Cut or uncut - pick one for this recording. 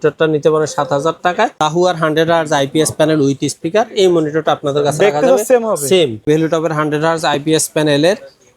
cut